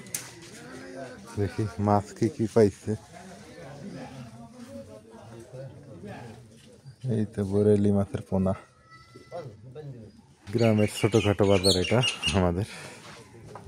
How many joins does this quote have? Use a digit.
1